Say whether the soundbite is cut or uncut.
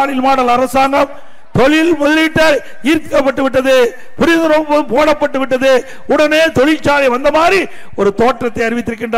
uncut